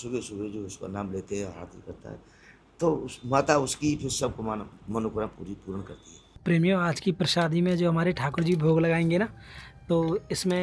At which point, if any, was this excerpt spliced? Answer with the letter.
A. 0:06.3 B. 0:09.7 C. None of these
A